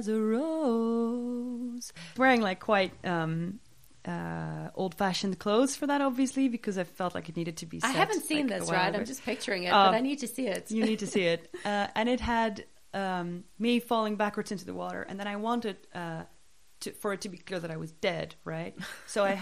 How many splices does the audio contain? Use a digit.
1